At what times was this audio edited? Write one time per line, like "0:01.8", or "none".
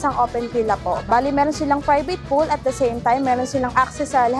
0:01.0